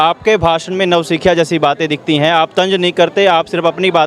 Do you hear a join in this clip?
no; 0 cuts

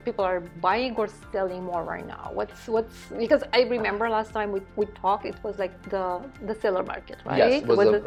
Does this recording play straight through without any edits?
yes; 0 cuts

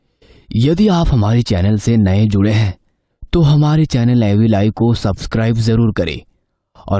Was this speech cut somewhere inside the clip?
no; 0 cuts

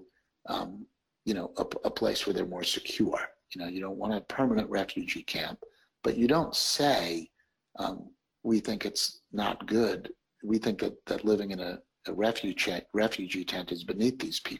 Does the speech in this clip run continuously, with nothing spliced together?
yes; 0 cuts

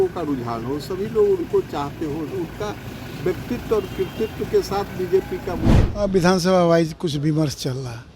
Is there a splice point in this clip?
yes; 1 cut; at 5.8 s

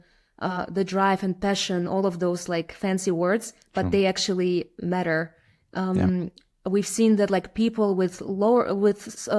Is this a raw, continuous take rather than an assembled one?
yes; 0 cuts

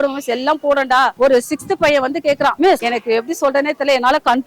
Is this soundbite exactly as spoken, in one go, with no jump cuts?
no; 2 cuts; at 1.1 s, 2.7 s

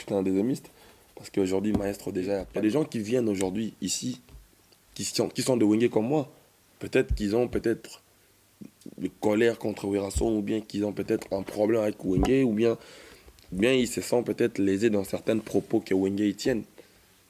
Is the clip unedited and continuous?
no; 1 cut; at 2.5 s

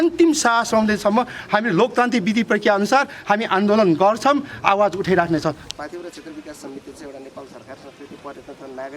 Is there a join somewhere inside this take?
yes; 1 cut; at 5.6 s

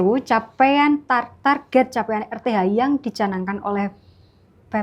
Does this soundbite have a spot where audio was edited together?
no; 0 cuts

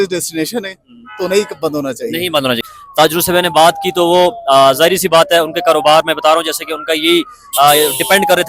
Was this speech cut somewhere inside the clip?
yes; 1 cut; at 2.6 s

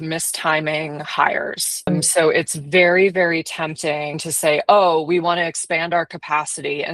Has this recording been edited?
yes; 1 cut; at 4.2 s

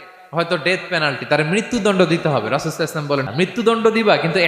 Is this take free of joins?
no; 1 cut; at 3.3 s

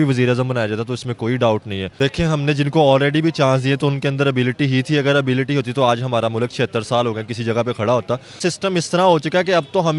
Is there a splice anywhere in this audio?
yes; 2 cuts; at 1.8 s, 8.4 s

